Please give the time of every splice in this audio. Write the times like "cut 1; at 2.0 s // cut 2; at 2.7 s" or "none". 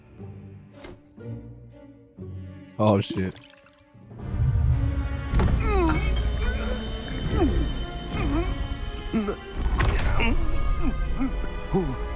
none